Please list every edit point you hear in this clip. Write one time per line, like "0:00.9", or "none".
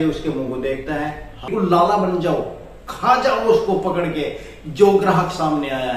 0:01.5